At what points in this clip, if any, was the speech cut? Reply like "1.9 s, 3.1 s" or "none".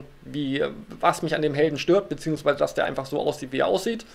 2.6 s